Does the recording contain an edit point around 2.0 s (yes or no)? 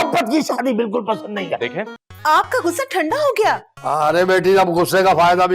yes